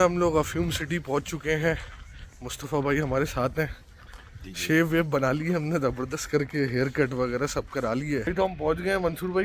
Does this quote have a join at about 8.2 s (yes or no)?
yes